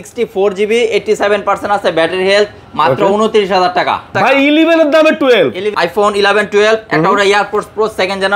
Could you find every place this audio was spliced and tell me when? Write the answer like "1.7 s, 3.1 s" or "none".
4.1 s, 5.7 s